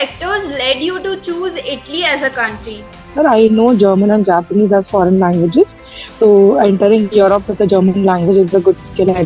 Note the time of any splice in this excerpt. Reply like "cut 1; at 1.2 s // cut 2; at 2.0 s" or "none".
cut 1; at 3.0 s

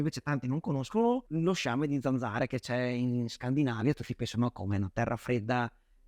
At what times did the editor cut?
none

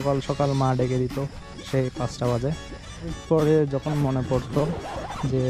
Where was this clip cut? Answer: cut 1; at 3.2 s

